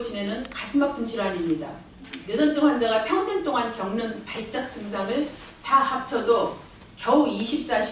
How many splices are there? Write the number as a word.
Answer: one